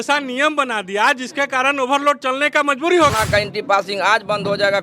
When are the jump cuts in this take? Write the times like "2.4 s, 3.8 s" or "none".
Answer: 3.1 s